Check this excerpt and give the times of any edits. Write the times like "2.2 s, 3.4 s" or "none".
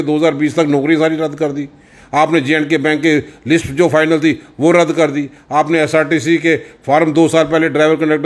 none